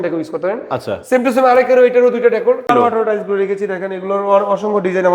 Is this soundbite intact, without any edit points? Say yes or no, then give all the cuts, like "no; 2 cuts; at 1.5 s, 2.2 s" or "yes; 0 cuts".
no; 1 cut; at 2.7 s